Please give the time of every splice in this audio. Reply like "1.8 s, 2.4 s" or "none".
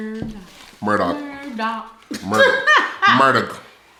none

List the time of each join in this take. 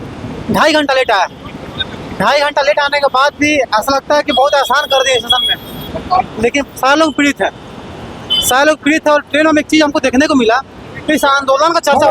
none

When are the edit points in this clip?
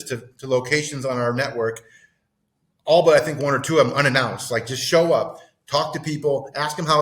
none

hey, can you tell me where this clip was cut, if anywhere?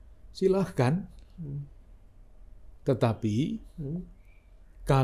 none

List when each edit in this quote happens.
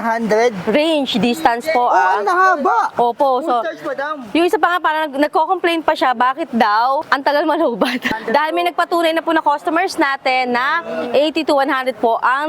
7.1 s, 8.2 s

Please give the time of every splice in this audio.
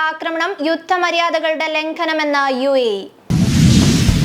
3.1 s

